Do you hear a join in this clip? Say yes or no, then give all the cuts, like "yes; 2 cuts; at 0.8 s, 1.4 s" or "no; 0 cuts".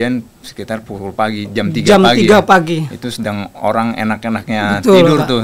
no; 0 cuts